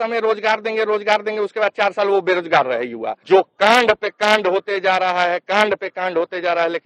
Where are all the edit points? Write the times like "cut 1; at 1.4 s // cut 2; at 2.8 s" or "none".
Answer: cut 1; at 3.2 s